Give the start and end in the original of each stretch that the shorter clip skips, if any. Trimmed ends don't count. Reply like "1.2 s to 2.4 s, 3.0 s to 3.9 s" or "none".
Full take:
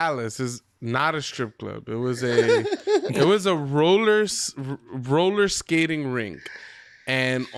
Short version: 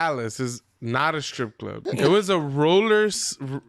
1.9 s to 3.1 s